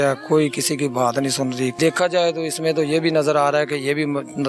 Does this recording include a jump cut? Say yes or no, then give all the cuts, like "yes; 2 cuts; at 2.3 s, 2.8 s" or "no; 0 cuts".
yes; 1 cut; at 1.7 s